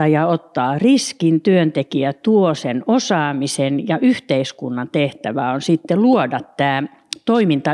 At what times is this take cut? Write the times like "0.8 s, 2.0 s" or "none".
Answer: none